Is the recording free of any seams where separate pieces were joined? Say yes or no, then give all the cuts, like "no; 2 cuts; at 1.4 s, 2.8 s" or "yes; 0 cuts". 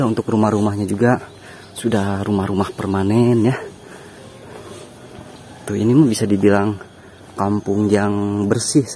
yes; 0 cuts